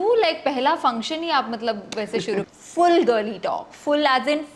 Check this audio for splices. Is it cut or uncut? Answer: cut